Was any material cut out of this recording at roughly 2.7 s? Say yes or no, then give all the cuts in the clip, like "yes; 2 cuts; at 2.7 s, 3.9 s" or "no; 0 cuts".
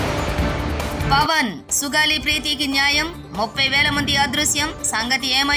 no; 1 cut; at 1.0 s